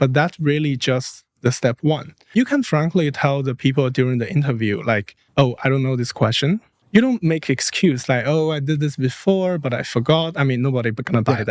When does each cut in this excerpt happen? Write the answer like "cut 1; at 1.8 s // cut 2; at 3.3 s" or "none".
cut 1; at 2.3 s // cut 2; at 5.2 s // cut 3; at 6.7 s